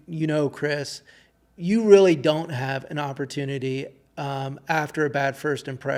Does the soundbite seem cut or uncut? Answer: uncut